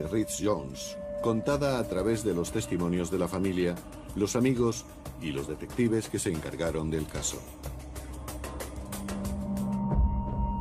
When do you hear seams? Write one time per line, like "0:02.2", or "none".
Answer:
none